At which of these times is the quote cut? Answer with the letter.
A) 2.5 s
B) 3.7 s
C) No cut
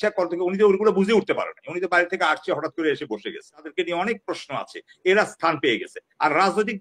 B